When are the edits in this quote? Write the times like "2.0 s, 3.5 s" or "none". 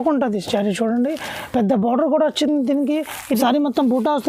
3.3 s